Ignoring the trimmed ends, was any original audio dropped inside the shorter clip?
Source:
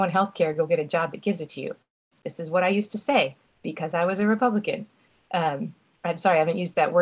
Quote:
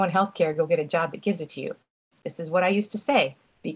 no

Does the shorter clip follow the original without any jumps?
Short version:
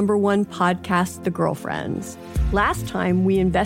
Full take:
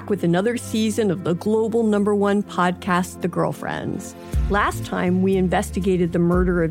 yes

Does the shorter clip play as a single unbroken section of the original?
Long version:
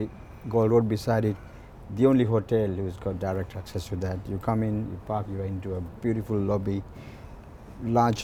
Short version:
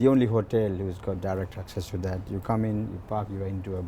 yes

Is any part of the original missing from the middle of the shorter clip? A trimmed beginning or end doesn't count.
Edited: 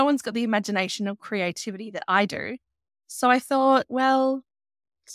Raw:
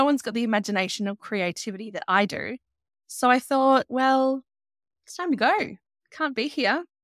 no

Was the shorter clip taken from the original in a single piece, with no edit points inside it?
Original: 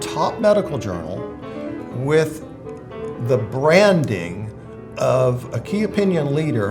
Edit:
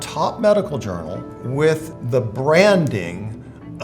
no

